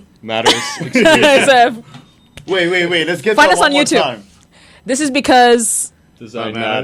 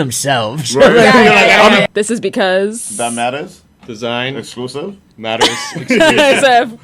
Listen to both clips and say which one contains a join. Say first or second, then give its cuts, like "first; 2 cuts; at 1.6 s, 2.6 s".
second; 1 cut; at 1.9 s